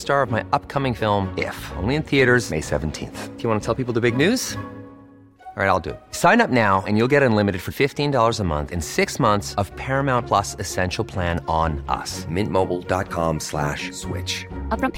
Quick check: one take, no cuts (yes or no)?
yes